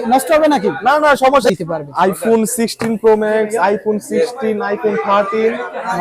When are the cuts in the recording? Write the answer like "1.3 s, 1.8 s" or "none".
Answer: 1.5 s